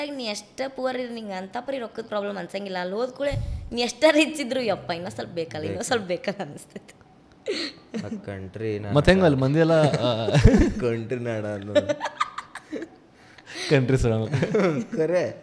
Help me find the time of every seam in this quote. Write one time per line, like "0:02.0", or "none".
none